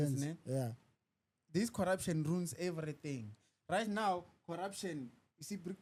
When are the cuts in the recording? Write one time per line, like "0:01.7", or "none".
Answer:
none